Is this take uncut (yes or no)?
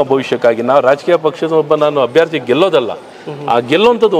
yes